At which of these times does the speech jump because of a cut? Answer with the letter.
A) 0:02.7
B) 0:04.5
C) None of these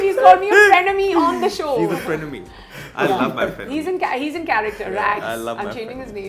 C